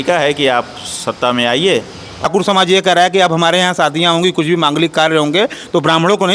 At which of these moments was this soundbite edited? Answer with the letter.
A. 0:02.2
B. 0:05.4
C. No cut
A